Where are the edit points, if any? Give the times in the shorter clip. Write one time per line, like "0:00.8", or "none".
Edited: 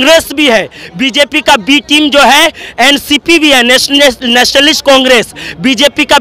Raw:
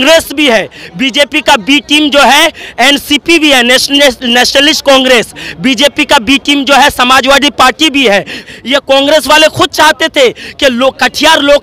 none